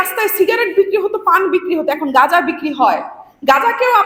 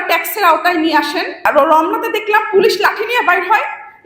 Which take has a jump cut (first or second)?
second